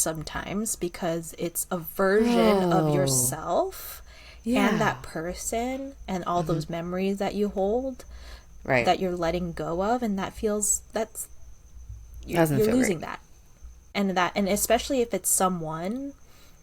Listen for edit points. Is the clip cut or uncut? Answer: cut